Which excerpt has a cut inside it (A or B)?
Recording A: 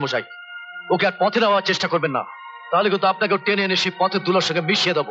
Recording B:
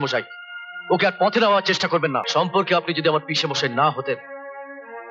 B